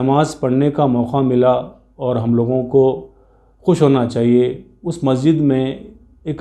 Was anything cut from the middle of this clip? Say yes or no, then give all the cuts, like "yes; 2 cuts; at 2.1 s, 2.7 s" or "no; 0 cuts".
no; 0 cuts